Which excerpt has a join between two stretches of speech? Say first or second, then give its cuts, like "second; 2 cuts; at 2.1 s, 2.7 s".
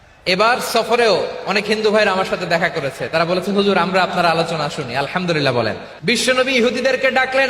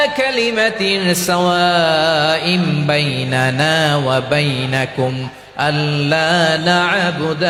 first; 1 cut; at 5.9 s